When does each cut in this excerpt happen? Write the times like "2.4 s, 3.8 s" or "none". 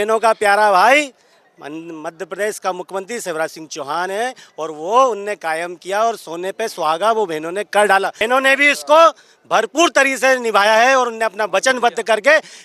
8.2 s